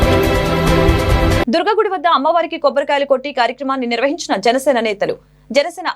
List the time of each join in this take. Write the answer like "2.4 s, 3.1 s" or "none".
1.2 s

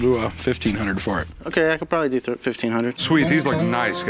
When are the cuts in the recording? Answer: 3.0 s

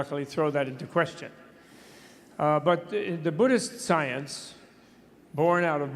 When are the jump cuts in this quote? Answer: 4.3 s

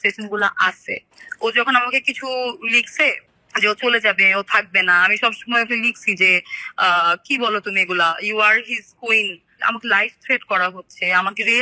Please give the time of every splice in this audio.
9.6 s

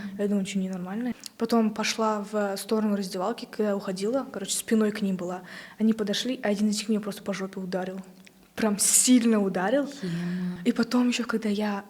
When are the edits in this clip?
1.2 s, 10.6 s

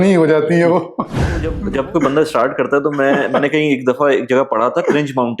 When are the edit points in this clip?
1.6 s

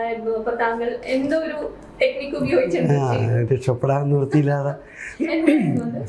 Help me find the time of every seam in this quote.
none

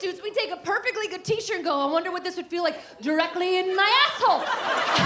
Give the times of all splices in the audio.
none

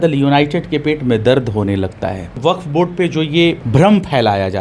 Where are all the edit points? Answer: 2.3 s, 3.6 s

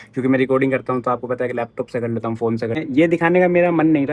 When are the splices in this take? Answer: 2.8 s

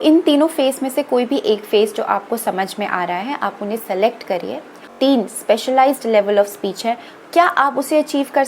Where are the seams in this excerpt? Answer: 4.9 s

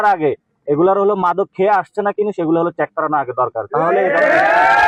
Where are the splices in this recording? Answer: none

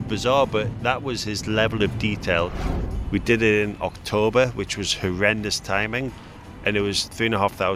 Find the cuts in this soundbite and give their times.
2.5 s, 6.1 s

